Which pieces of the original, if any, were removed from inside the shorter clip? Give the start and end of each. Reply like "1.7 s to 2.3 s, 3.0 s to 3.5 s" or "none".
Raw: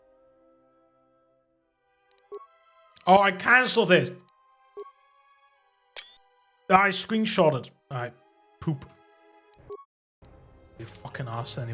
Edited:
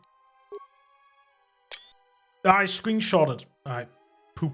none